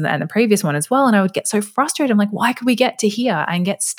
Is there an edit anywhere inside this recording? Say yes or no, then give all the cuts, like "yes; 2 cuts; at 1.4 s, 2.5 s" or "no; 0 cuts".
no; 0 cuts